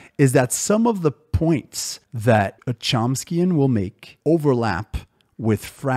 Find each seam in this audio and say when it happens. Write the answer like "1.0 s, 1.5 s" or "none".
none